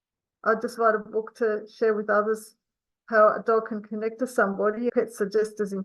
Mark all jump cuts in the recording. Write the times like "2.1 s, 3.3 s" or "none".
4.9 s